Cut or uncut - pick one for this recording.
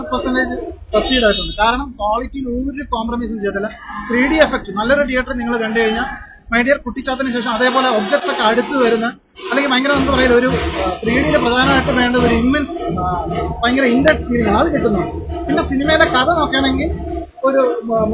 uncut